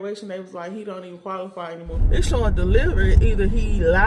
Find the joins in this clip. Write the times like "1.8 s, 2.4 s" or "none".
1.9 s